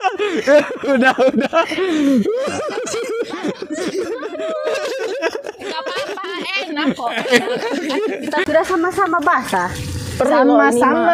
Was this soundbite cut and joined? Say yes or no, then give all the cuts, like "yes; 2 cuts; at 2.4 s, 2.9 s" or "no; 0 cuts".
yes; 1 cut; at 8.4 s